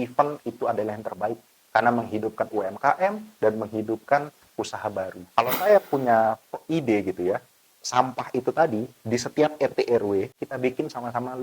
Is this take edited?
yes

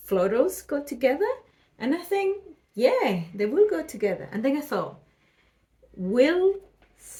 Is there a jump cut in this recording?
no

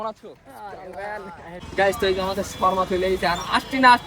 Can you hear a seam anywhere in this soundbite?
yes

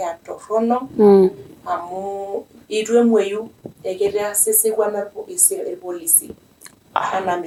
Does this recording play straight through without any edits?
yes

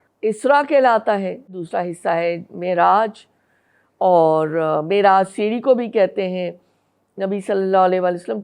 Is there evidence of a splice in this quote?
yes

